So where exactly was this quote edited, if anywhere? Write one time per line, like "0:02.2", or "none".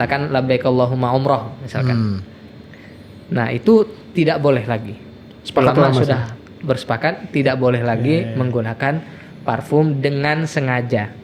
none